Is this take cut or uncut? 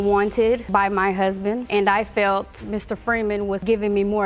uncut